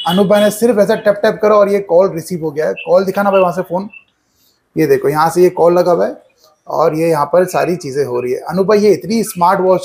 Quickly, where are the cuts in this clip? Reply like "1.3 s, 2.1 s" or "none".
none